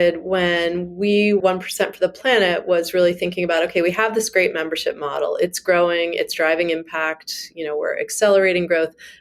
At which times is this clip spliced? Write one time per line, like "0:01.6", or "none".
0:01.4